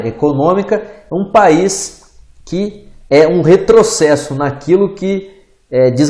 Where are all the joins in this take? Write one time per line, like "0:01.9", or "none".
0:04.3